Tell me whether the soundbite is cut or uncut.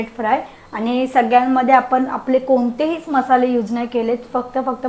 uncut